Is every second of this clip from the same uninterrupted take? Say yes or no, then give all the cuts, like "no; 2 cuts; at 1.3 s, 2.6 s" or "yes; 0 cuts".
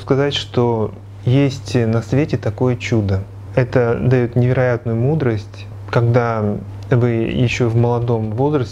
yes; 0 cuts